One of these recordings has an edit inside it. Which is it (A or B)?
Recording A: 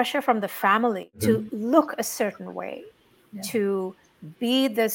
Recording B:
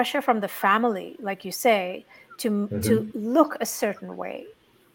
A